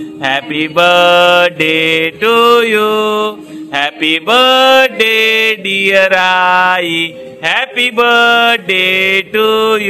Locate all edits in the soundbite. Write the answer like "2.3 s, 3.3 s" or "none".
none